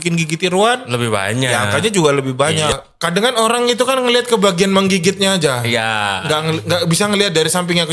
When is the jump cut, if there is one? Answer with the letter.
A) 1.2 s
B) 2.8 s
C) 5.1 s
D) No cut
B